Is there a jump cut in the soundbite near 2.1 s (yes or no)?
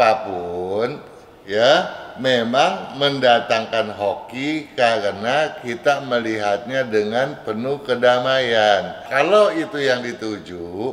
no